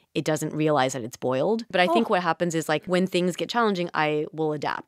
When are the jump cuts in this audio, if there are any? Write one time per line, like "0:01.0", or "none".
0:01.7
0:02.8